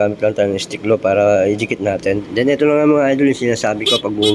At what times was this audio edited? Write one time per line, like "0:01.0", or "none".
0:02.2